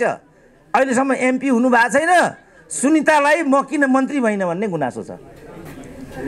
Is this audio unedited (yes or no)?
yes